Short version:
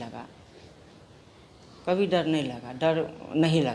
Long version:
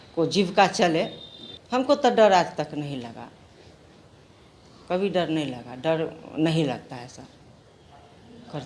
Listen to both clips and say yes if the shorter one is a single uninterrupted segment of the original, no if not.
yes